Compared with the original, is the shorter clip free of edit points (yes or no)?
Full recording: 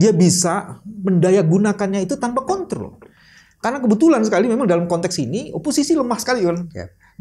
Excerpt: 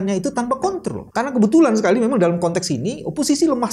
no